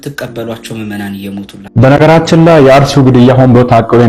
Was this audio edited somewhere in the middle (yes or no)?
yes